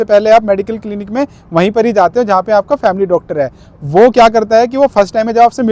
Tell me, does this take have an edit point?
no; 0 cuts

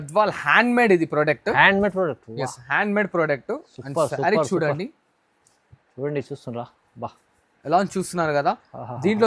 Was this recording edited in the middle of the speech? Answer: no; 0 cuts

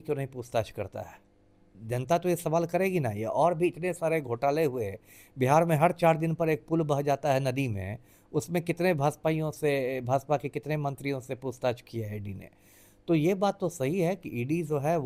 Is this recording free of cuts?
yes; 0 cuts

